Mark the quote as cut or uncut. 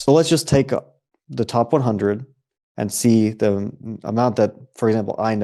uncut